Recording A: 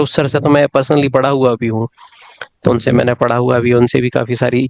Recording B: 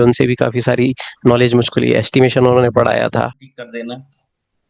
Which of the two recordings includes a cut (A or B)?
B